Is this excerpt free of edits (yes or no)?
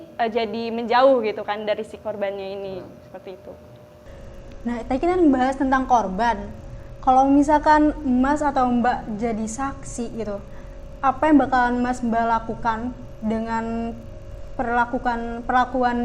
yes